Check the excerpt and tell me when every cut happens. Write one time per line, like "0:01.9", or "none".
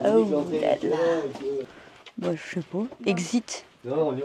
0:01.7